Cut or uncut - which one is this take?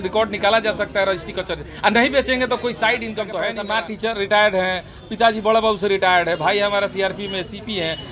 cut